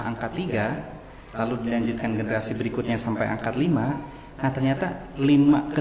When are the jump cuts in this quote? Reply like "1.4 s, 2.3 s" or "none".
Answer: none